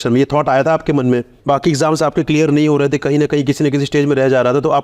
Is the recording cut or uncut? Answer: cut